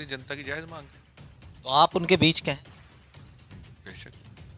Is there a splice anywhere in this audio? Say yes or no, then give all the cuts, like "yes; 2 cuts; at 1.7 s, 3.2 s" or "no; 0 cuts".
no; 0 cuts